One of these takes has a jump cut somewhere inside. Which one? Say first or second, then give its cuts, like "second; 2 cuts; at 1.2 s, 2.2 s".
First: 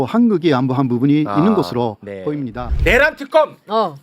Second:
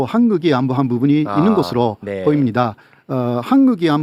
first; 1 cut; at 2.7 s